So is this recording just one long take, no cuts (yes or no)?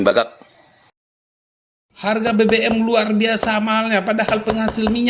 no